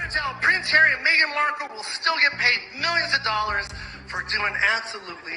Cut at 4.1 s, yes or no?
no